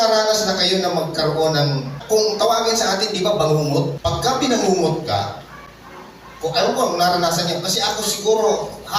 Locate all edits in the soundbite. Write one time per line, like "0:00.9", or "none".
0:02.0
0:04.2